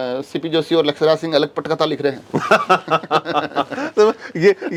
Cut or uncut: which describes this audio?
uncut